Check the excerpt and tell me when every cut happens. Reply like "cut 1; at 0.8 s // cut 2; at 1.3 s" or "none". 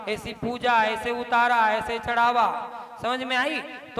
none